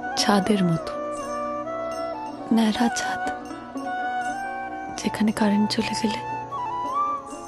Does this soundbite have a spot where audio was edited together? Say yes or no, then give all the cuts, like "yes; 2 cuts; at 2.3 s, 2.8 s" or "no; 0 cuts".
no; 0 cuts